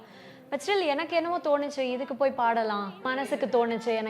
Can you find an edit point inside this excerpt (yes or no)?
yes